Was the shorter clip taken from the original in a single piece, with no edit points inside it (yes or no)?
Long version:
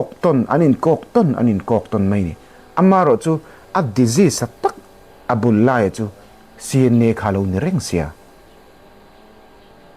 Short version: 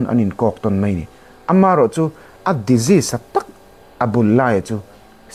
yes